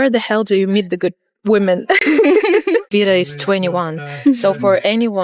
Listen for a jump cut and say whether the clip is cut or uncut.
cut